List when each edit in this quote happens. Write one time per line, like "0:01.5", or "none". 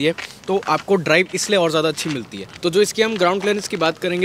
none